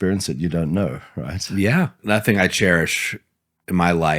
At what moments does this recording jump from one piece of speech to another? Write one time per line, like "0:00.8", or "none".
0:02.0